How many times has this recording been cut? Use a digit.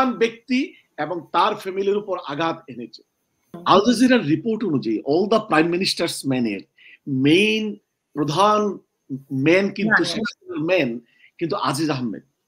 1